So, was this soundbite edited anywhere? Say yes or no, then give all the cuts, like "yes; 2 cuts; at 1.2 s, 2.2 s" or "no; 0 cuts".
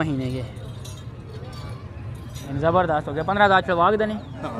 yes; 1 cut; at 2.5 s